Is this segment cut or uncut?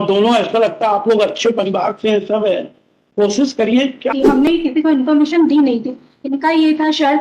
cut